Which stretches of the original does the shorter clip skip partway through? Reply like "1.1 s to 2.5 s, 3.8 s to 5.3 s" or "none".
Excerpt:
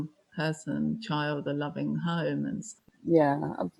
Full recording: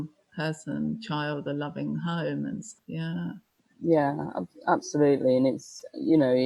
2.8 s to 3.5 s